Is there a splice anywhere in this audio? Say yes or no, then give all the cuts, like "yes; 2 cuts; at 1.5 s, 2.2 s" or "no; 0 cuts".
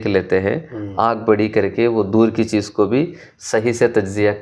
no; 0 cuts